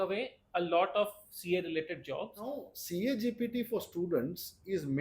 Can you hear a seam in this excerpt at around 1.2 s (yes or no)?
no